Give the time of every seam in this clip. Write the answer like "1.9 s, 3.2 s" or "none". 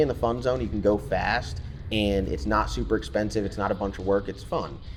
none